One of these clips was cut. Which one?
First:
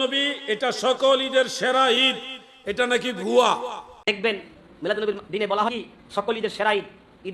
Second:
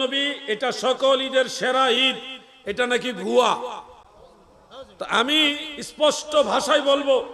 first; 1 cut; at 4.0 s

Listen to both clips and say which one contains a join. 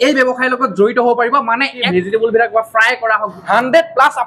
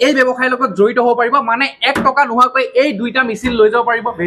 first; 2 cuts; at 1.8 s, 3.3 s

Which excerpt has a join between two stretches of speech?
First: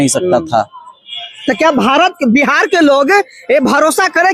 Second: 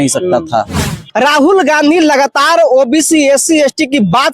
second; 1 cut; at 1.0 s

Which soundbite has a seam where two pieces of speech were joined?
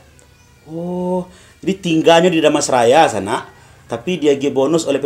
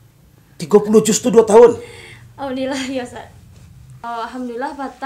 second; 1 cut; at 4.0 s

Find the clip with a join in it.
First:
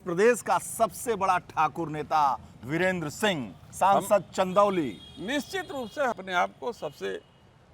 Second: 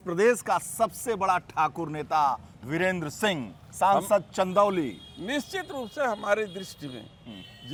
first; 1 cut; at 6.2 s

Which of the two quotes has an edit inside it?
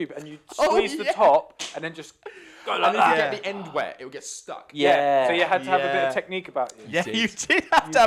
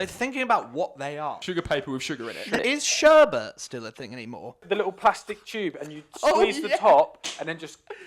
second; 3 cuts; at 1.4 s, 2.6 s, 4.6 s

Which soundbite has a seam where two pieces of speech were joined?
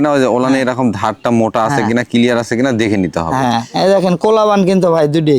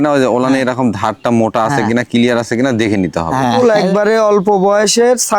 second; 1 cut; at 3.6 s

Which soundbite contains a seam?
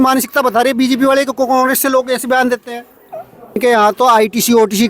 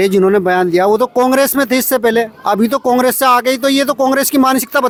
first; 1 cut; at 3.6 s

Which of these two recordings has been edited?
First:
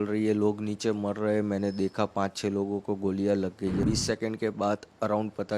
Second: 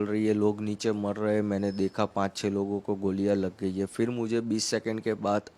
first; 1 cut; at 3.8 s

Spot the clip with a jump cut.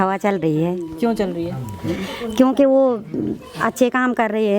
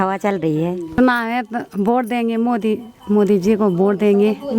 second; 1 cut; at 1.0 s

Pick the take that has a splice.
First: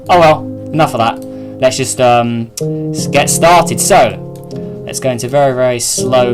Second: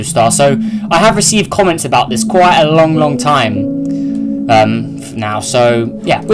second; 1 cut; at 1.4 s

